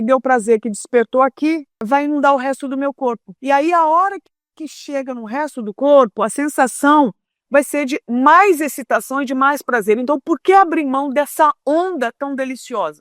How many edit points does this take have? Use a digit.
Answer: 2